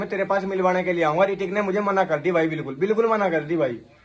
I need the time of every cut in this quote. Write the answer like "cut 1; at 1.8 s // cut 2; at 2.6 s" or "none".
none